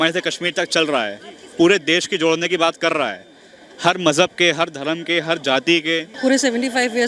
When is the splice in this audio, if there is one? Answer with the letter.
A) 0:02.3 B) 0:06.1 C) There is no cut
B